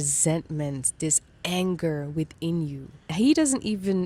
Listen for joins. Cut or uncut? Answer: uncut